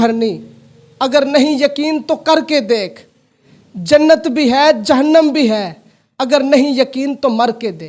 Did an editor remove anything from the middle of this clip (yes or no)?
no